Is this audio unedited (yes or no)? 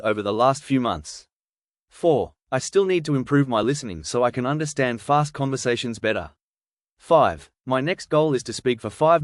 yes